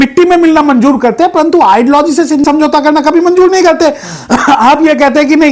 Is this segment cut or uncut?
uncut